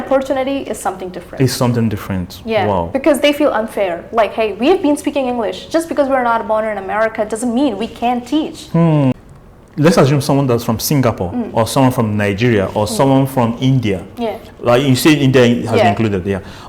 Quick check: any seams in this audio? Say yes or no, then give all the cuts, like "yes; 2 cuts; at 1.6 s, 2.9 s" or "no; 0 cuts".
yes; 1 cut; at 9.1 s